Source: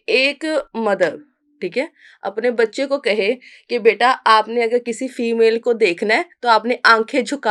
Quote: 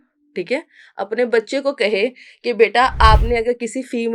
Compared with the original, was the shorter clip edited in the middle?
no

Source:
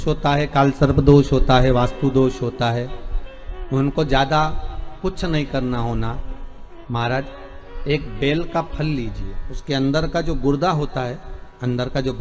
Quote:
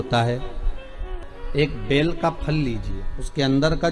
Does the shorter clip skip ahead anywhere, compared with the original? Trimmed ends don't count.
yes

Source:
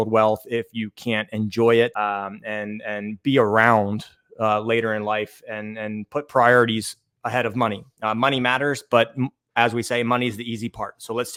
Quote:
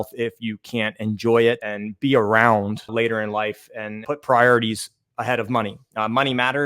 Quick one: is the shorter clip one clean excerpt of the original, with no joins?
no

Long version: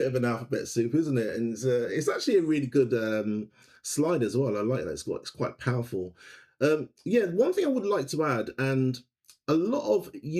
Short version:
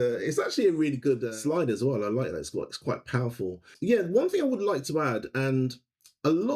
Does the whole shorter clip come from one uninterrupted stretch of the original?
no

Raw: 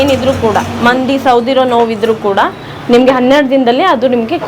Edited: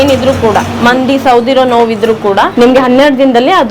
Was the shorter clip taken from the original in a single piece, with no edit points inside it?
no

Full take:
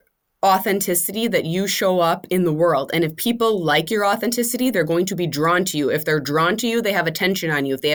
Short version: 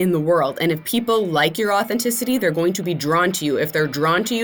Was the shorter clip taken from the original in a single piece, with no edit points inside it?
yes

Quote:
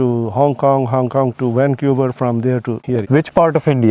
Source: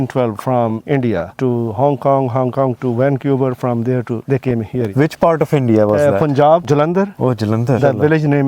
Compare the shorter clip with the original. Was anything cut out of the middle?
yes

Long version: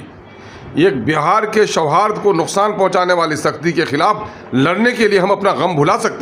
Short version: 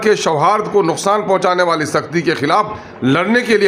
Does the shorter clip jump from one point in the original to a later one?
no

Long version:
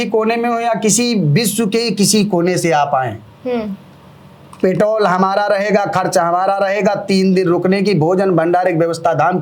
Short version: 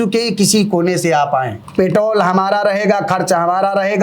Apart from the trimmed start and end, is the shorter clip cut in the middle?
yes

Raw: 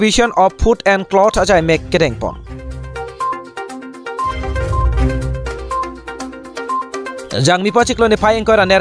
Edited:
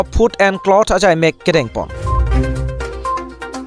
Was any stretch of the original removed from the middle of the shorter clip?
yes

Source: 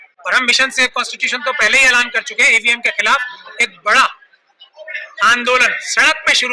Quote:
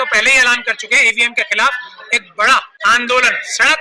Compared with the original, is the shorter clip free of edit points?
no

